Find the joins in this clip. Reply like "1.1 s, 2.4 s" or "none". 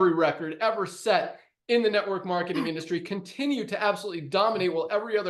none